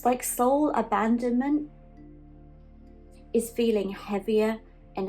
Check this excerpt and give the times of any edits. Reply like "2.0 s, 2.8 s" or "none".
none